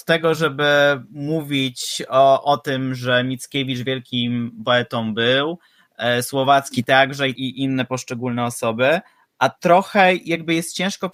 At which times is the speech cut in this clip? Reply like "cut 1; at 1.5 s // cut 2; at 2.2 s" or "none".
none